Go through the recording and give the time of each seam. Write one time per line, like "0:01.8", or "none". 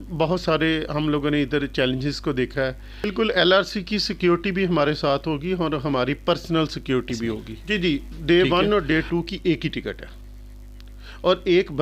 0:03.1
0:07.5

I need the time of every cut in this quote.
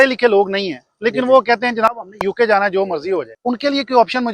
0:03.3

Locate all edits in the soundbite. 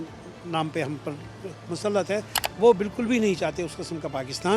0:02.4

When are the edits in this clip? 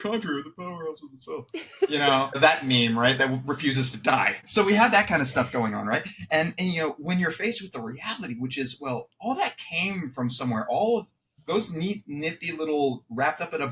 0:02.4
0:04.4

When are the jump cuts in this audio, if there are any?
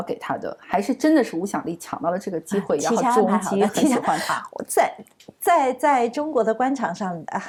none

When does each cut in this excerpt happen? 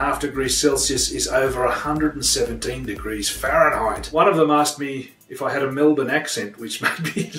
0:04.0

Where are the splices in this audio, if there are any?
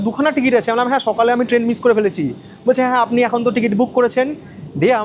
none

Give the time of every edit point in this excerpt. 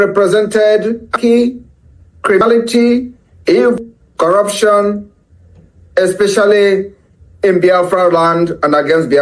0:01.1
0:02.4
0:03.8

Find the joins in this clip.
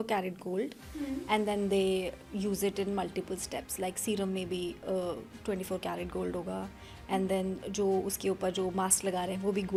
none

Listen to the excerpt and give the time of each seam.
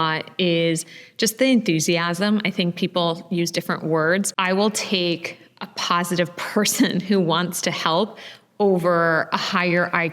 0:04.3

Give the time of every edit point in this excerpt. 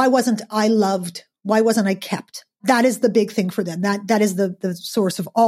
0:02.6

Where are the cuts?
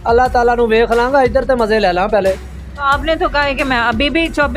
none

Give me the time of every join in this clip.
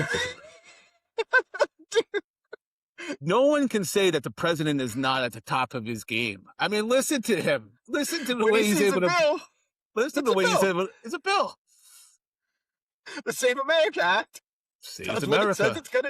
0:03.0

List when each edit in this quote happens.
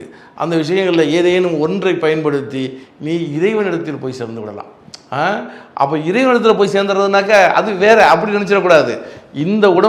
none

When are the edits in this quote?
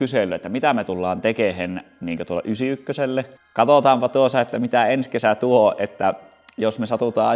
0:03.3

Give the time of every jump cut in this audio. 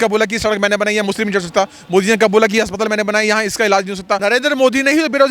0:04.2

